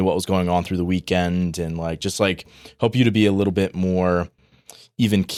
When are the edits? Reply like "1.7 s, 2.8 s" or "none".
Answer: none